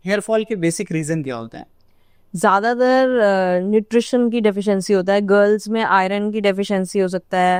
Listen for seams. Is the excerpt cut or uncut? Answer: uncut